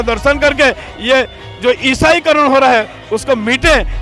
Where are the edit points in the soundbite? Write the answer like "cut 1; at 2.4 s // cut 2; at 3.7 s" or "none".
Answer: none

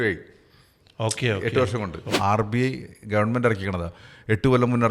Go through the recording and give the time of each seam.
cut 1; at 2.1 s

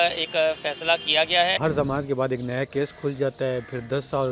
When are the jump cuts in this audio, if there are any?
cut 1; at 1.6 s

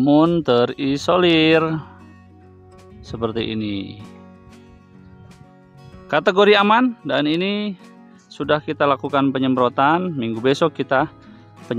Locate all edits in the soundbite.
cut 1; at 4.0 s // cut 2; at 5.4 s

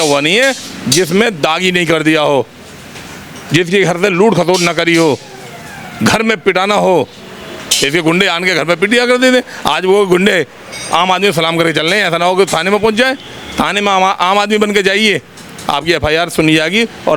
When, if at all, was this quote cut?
none

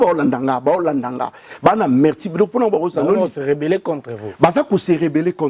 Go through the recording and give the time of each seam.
none

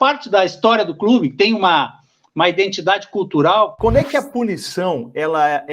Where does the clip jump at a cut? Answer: cut 1; at 3.7 s

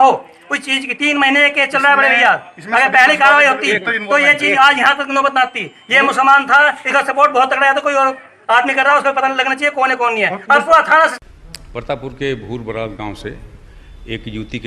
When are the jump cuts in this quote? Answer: cut 1; at 11.1 s

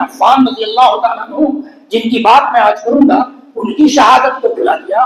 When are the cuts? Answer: none

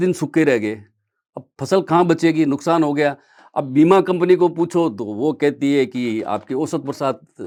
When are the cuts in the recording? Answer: none

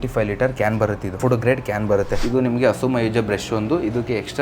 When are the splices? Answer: cut 1; at 1.1 s // cut 2; at 2.2 s

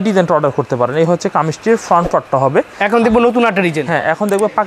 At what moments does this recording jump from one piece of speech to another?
cut 1; at 2.7 s

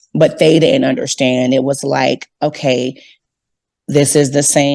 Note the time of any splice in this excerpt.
cut 1; at 3.1 s

